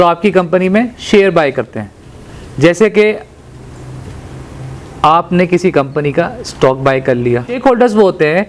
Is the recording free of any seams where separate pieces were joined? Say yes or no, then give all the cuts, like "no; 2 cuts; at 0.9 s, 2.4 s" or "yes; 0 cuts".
no; 1 cut; at 7.6 s